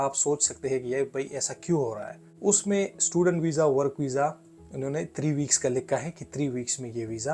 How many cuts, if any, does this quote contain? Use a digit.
1